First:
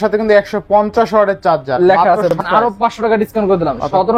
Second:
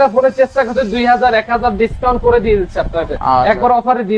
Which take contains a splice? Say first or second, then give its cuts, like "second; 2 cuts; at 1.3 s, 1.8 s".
first; 1 cut; at 2.4 s